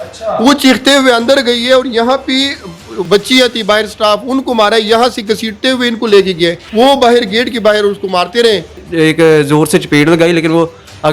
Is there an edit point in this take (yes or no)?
yes